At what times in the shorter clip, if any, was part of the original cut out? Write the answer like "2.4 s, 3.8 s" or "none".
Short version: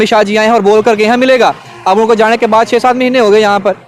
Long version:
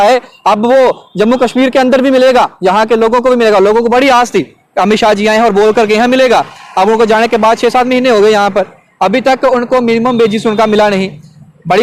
none